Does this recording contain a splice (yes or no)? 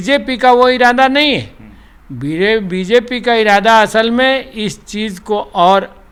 no